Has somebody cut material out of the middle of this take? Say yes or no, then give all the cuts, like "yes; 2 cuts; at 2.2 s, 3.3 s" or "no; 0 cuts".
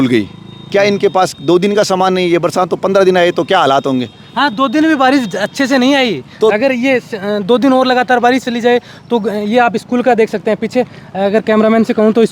no; 0 cuts